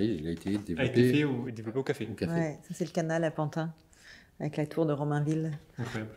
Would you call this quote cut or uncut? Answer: uncut